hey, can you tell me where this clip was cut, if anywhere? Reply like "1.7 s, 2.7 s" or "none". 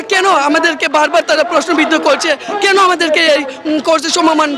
none